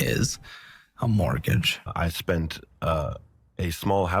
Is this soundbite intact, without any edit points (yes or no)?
no